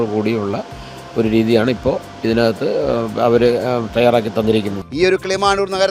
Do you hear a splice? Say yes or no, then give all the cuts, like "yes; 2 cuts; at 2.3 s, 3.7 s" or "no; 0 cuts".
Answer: yes; 1 cut; at 4.8 s